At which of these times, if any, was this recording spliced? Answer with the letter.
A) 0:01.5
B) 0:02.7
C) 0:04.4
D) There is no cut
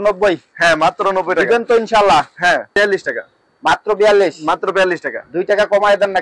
B